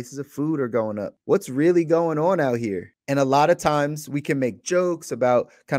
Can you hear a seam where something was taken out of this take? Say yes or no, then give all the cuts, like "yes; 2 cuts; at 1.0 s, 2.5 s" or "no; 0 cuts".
yes; 2 cuts; at 1.1 s, 2.9 s